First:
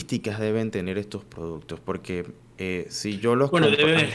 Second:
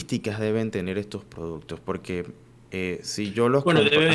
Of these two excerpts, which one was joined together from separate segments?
first; 1 cut; at 2.4 s

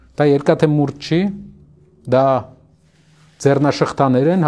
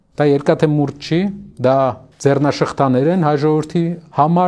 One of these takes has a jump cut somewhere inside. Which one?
second; 2 cuts; at 1.4 s, 2.1 s

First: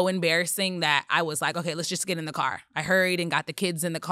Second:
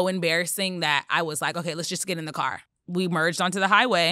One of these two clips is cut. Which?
second; 1 cut; at 2.6 s

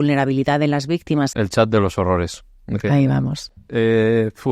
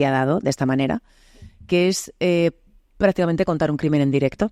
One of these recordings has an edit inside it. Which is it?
first; 1 cut; at 1.3 s

